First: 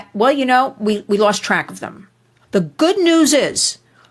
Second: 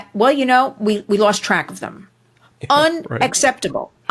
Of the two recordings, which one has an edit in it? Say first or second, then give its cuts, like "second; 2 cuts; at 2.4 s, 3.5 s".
first; 1 cut; at 2.4 s